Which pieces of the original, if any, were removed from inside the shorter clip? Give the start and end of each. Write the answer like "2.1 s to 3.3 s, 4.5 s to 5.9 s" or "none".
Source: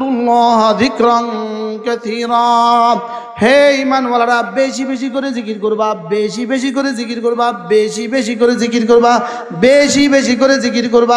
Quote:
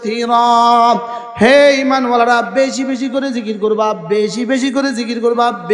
none